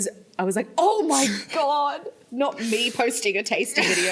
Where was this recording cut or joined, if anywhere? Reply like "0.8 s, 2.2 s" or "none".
none

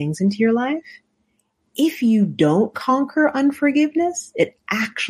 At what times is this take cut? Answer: none

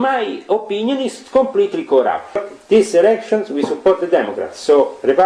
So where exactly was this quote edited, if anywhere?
2.4 s

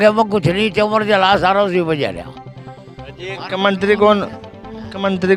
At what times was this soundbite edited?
none

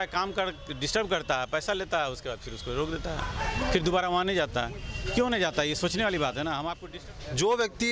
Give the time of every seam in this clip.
6.8 s

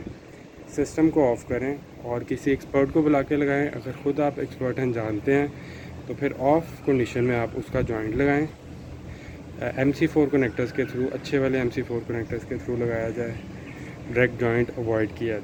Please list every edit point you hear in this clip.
none

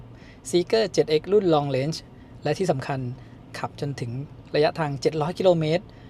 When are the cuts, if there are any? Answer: none

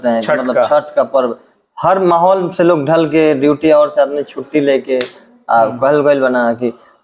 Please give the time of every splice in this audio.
none

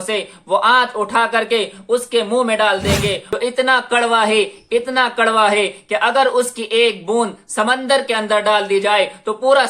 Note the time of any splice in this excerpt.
3.2 s

